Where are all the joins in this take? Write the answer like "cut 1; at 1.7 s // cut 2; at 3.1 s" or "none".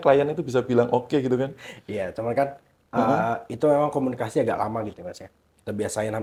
none

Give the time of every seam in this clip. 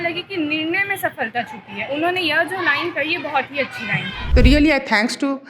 cut 1; at 4.2 s

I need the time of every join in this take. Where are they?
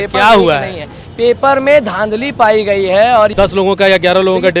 cut 1; at 3.3 s

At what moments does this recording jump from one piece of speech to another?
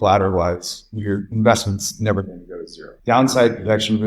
cut 1; at 2.9 s

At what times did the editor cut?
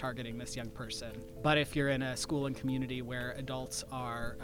cut 1; at 1.3 s

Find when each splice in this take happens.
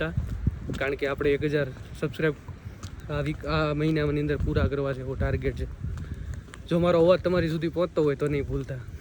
none

